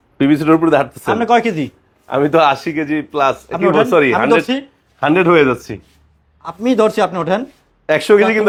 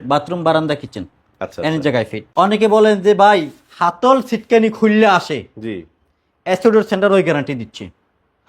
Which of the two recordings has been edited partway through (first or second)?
second